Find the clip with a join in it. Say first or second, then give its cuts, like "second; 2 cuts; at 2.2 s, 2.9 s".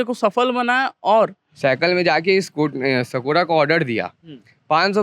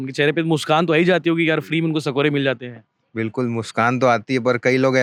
first; 1 cut; at 1.4 s